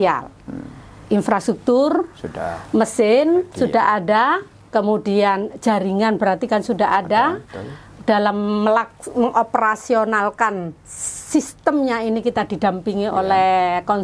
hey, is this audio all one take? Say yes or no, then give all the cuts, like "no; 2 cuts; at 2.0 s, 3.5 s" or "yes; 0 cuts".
no; 1 cut; at 1.0 s